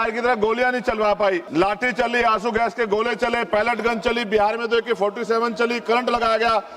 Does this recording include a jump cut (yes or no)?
yes